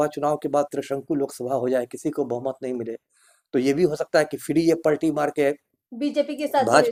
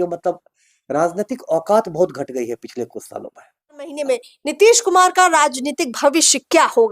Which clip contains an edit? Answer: second; 1 cut; at 4.0 s

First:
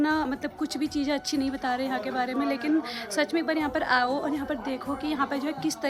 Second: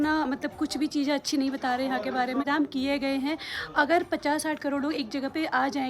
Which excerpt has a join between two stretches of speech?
second; 1 cut; at 2.4 s

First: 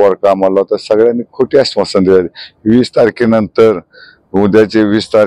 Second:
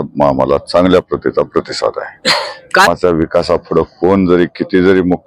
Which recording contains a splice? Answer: second; 1 cut; at 2.9 s

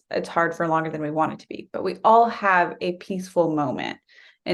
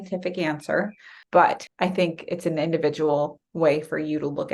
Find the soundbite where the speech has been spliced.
second; 2 cuts; at 1.1 s, 1.7 s

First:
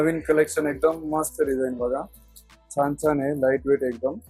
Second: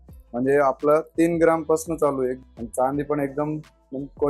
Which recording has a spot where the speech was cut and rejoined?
second; 1 cut; at 2.4 s

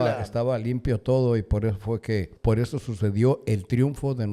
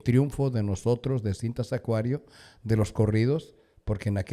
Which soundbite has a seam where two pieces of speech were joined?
first; 1 cut; at 2.3 s

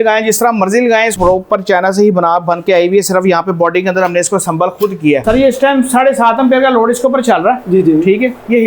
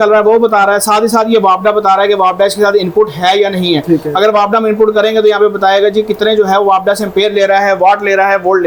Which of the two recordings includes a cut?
first; 2 cuts; at 1.1 s, 5.2 s

